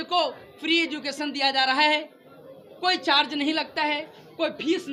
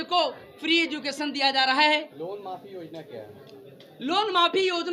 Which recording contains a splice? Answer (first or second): second